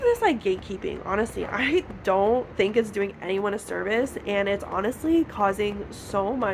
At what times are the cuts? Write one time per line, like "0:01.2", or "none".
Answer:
none